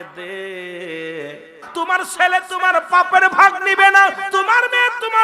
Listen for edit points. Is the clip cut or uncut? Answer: cut